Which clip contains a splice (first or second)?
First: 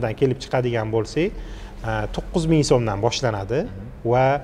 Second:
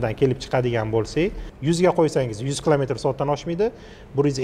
second